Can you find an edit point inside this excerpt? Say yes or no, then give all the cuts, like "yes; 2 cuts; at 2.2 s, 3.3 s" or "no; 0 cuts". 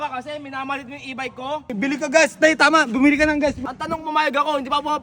yes; 2 cuts; at 1.7 s, 3.6 s